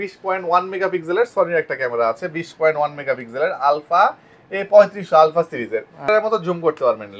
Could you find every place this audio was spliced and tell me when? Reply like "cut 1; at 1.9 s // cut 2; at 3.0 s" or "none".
cut 1; at 6.1 s